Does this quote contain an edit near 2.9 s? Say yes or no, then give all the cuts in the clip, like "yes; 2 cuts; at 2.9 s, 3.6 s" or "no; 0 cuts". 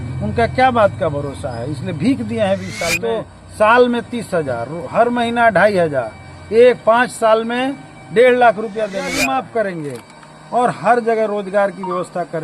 yes; 2 cuts; at 2.9 s, 9.2 s